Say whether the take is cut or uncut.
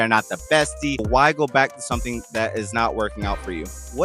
cut